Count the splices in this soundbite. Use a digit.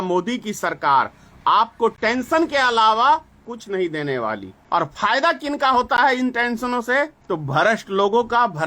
3